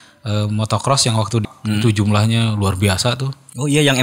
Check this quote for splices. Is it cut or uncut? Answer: cut